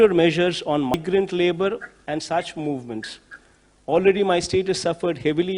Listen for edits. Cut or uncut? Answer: cut